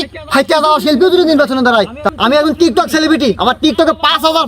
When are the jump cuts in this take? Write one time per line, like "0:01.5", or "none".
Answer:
0:02.0